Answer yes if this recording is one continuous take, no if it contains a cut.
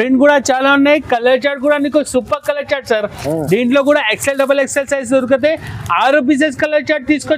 yes